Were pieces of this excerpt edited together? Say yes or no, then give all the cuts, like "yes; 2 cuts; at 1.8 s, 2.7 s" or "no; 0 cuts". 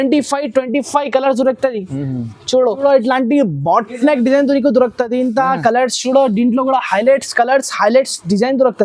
yes; 1 cut; at 2.8 s